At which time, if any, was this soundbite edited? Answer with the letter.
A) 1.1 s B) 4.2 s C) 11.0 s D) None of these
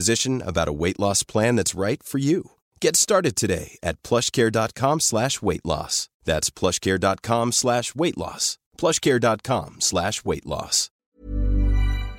C